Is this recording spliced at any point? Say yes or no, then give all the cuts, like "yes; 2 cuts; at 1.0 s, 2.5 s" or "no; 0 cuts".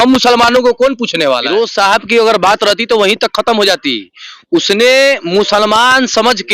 yes; 1 cut; at 1.4 s